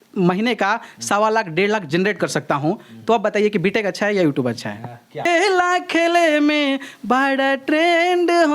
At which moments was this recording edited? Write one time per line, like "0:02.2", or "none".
0:05.3